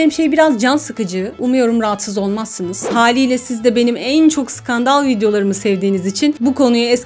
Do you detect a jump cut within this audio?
yes; 1 cut; at 2.9 s

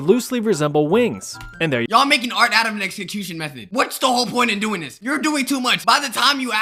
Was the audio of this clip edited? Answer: no; 0 cuts

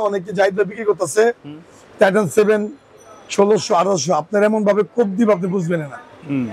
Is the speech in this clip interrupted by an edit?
no; 0 cuts

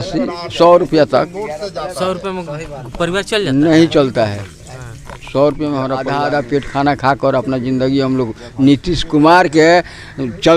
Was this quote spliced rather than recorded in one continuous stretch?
yes; 1 cut; at 6.1 s

